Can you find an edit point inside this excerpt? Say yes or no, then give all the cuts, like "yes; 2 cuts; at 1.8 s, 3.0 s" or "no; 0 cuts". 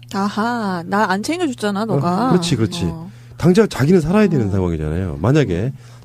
yes; 1 cut; at 2.6 s